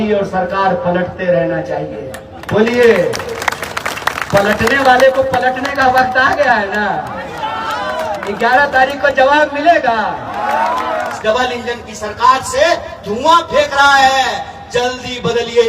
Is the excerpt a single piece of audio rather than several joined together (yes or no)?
no